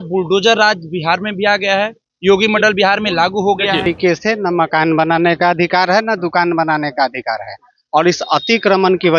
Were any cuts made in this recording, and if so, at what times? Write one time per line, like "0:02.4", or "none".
0:03.9